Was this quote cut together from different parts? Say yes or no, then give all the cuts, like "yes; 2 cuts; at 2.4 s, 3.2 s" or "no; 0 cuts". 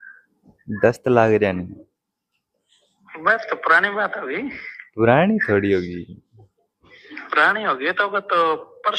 no; 0 cuts